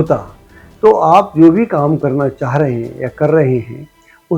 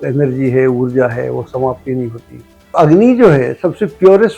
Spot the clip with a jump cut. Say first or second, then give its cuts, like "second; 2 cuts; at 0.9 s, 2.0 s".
second; 1 cut; at 2.7 s